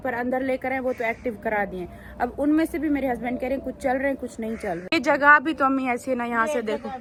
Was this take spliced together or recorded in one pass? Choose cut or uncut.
uncut